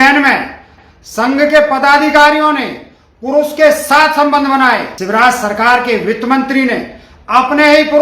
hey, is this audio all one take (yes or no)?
no